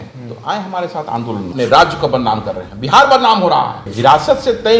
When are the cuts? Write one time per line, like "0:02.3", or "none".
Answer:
0:01.5
0:03.8